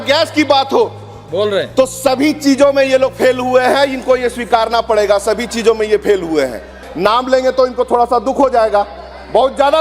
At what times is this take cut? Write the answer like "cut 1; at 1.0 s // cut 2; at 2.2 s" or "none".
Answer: none